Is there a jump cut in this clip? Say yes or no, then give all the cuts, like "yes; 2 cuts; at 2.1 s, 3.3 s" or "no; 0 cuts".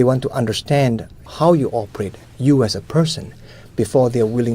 yes; 1 cut; at 1.2 s